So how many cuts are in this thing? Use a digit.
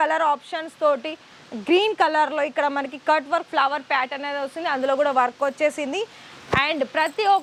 0